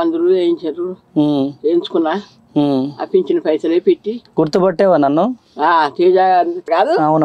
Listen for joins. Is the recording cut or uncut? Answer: uncut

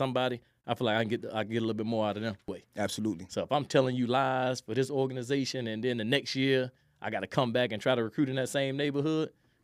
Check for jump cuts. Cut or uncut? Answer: cut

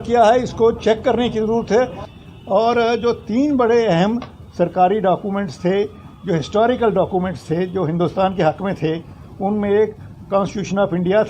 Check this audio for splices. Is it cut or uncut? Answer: cut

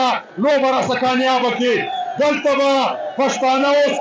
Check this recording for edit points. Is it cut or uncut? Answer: uncut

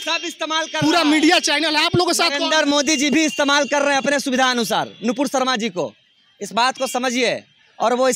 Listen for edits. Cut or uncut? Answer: uncut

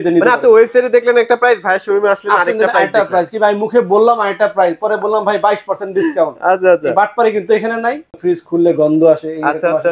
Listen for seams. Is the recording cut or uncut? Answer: cut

